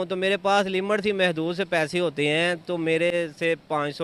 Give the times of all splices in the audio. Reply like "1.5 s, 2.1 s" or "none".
none